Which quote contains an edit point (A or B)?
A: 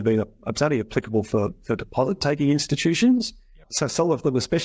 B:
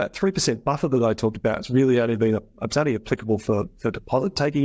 A